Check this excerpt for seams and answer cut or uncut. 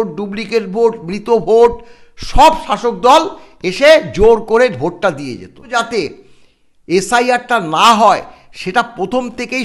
cut